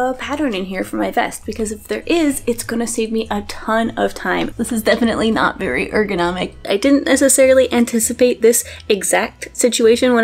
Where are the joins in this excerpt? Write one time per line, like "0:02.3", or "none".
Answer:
0:04.5
0:06.7